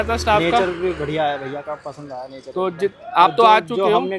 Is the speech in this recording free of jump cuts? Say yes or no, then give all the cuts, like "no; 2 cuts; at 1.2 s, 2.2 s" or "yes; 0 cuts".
yes; 0 cuts